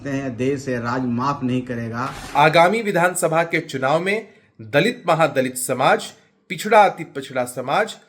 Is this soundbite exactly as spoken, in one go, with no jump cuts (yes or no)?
no